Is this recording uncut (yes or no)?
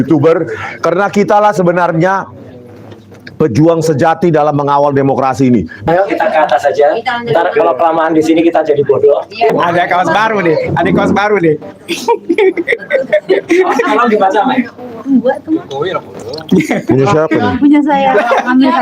no